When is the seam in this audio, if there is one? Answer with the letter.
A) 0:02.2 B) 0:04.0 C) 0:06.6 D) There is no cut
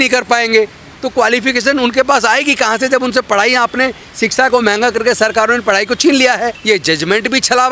C